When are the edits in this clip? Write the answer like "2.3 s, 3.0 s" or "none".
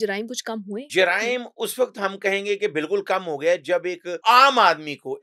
0.9 s, 4.1 s